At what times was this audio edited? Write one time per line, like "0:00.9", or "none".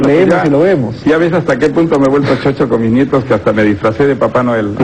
0:01.9

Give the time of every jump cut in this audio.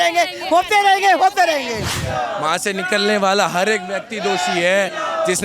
0:01.9

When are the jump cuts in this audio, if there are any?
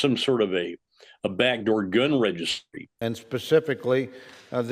none

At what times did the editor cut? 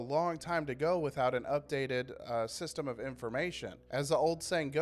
none

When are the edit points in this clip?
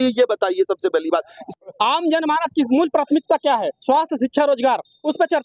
0:01.4

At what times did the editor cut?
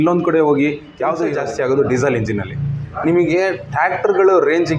0:01.3

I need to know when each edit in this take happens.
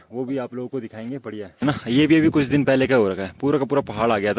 0:01.5

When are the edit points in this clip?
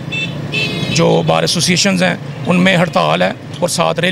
none

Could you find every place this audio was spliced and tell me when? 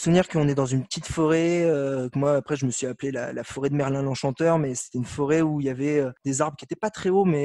none

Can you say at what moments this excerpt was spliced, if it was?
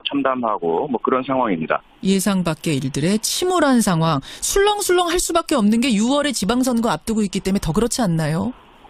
0:03.8

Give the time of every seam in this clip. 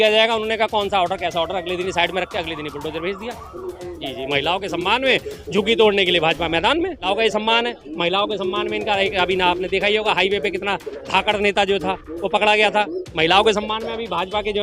0:03.8
0:07.1

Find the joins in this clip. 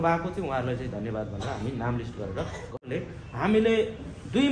0:02.9

